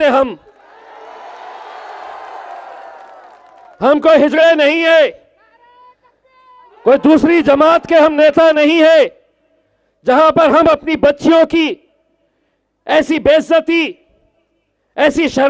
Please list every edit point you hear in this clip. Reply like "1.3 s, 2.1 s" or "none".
none